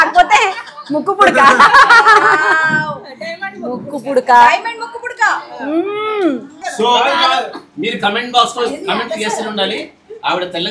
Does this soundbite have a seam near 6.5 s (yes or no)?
yes